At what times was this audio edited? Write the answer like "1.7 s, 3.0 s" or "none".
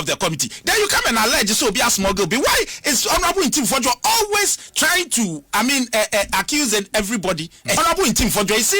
7.8 s